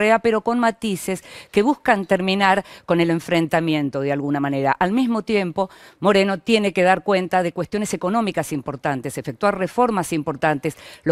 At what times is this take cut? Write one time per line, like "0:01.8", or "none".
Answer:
none